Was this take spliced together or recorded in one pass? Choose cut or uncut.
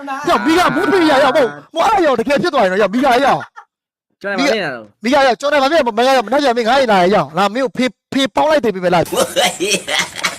cut